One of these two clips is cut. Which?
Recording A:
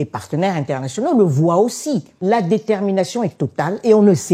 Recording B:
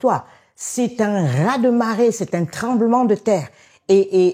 A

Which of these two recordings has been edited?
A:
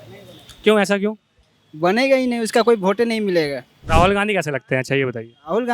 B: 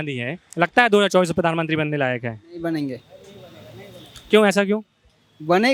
A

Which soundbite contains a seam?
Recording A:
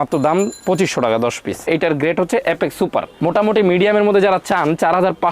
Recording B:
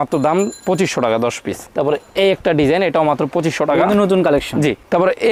A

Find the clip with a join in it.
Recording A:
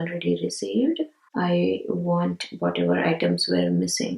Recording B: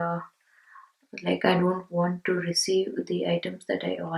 A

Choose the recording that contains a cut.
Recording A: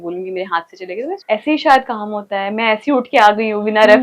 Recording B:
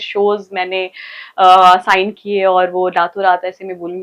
A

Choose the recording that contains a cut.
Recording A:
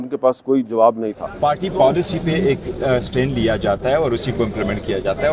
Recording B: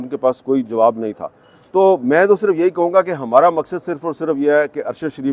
A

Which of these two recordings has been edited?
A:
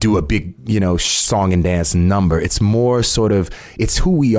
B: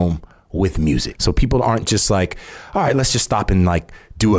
B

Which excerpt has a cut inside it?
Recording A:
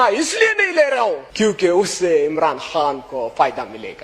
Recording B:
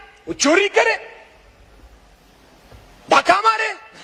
A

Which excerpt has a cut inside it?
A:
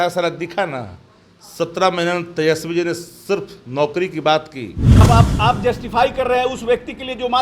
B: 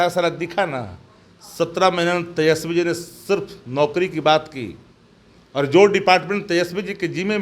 A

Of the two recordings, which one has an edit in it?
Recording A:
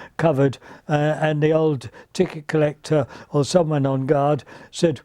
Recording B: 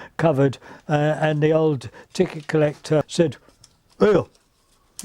B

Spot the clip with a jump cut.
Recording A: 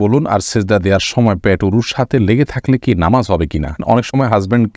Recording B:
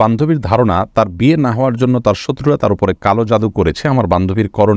A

